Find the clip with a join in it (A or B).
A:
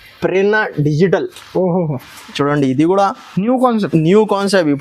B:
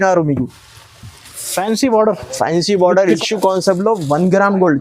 B